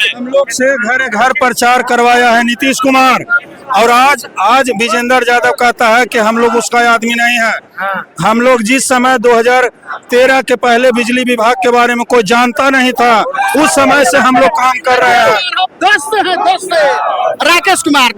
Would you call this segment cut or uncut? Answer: uncut